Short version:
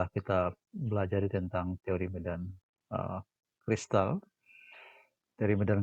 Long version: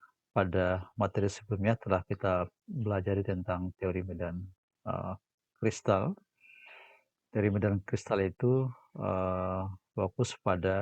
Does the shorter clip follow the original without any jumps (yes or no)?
yes